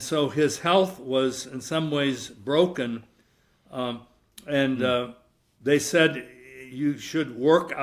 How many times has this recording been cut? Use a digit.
0